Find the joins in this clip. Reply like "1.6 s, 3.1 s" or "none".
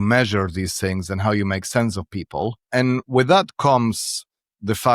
2.7 s